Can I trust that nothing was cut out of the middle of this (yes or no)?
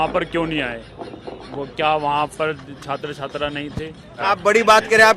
no